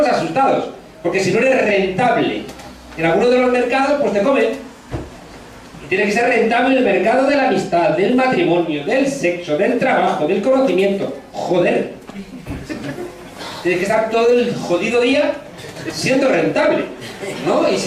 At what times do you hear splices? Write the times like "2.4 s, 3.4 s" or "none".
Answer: none